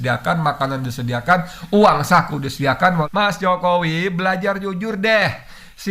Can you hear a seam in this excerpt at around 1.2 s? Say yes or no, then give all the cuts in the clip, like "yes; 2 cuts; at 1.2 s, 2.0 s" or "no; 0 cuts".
no; 1 cut; at 3.1 s